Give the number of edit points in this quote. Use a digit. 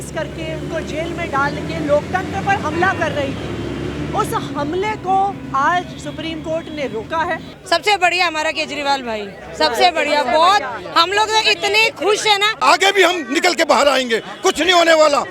2